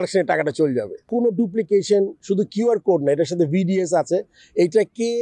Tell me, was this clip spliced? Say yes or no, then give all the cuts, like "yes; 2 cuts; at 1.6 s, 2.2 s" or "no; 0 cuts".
yes; 1 cut; at 1.0 s